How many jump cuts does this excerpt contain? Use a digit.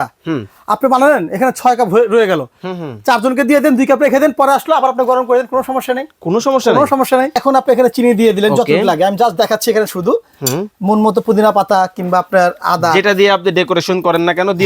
1